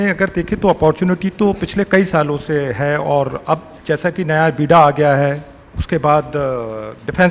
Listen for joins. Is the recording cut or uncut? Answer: uncut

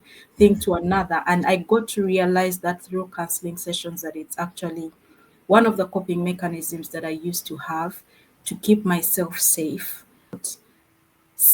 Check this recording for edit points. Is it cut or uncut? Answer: cut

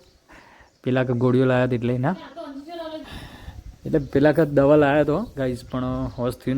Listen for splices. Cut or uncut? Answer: cut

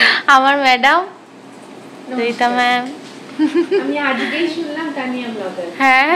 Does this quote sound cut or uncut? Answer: uncut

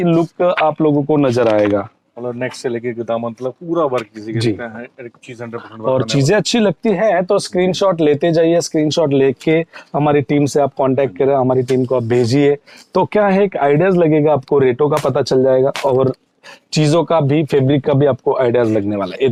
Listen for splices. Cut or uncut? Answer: uncut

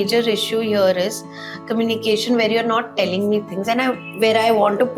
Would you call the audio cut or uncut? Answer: uncut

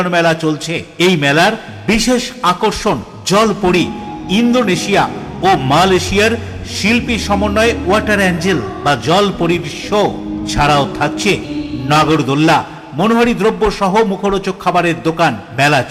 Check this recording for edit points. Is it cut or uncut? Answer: uncut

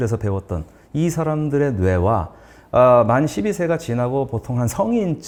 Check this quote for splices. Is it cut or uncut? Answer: uncut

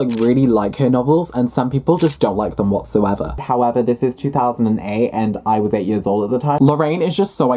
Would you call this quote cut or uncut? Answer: cut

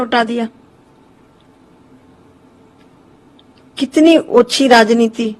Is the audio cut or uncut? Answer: uncut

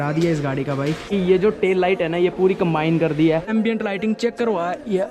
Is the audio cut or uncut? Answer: cut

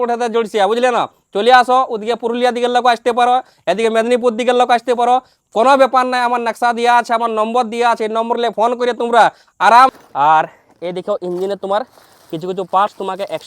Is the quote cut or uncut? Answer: cut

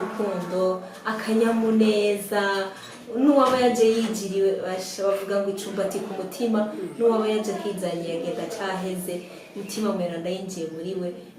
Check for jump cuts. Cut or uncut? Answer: uncut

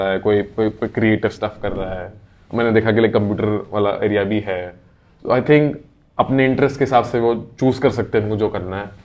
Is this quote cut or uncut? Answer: uncut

